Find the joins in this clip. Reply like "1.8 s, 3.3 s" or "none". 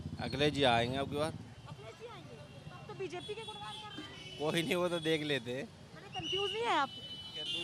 none